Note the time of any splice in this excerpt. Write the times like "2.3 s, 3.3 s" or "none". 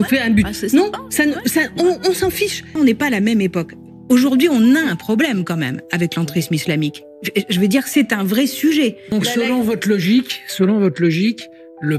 2.6 s, 9.1 s